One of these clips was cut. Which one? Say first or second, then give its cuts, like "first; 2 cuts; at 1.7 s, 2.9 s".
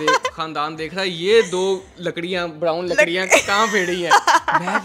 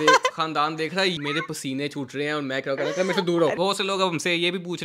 second; 2 cuts; at 1.2 s, 3.6 s